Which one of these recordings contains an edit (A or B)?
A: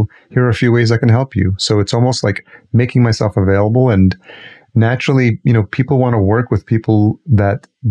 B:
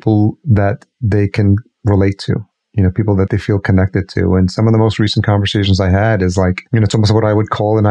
B